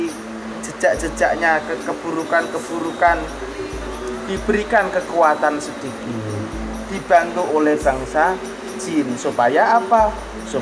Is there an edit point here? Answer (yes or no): no